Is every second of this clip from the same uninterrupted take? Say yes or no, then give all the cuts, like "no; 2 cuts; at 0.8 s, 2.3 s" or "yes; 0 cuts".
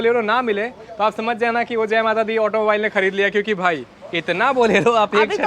yes; 0 cuts